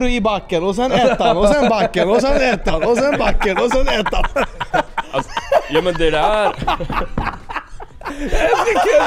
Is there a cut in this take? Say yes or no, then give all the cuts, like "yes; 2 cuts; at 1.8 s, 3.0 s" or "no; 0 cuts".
no; 0 cuts